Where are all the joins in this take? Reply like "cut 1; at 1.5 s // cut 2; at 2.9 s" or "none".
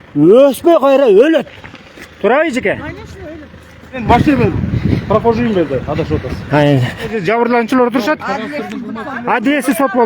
cut 1; at 4.0 s // cut 2; at 7.2 s